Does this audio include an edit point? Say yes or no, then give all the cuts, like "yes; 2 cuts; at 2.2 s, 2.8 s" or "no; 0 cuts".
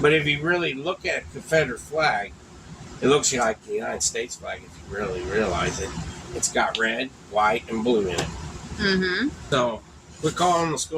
yes; 1 cut; at 9.4 s